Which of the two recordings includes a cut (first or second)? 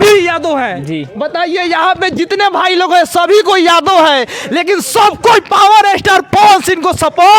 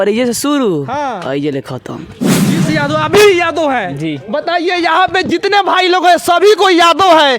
second